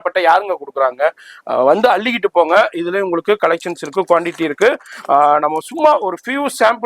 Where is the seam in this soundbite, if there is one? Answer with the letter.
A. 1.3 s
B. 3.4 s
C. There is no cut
C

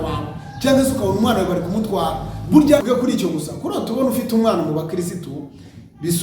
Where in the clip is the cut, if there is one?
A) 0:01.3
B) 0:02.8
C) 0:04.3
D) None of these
B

